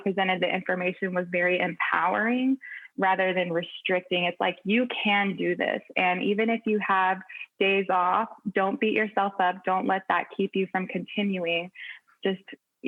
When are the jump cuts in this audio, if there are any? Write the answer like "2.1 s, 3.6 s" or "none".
none

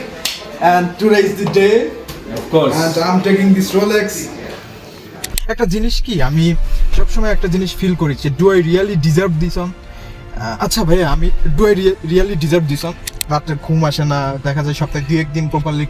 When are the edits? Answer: 5.3 s, 13.2 s

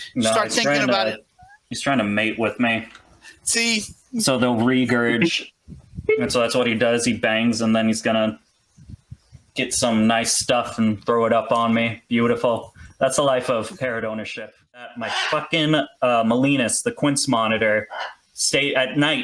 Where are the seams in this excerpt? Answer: 15.0 s

